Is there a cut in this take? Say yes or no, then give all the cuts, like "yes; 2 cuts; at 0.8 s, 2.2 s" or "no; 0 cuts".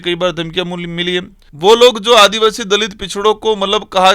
yes; 1 cut; at 1.4 s